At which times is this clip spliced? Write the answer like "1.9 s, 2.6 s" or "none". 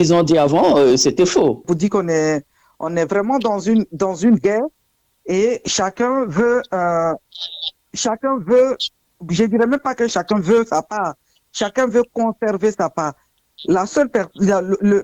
1.7 s